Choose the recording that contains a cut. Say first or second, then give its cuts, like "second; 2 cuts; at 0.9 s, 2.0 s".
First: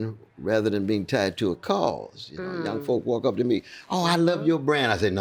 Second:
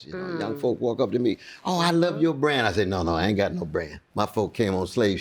second; 1 cut; at 4.0 s